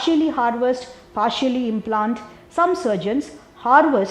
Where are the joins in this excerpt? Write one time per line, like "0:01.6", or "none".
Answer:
0:02.3